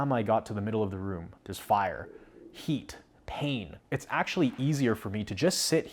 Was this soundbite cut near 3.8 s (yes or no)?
yes